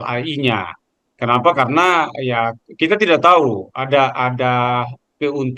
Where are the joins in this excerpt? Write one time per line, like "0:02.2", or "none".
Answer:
none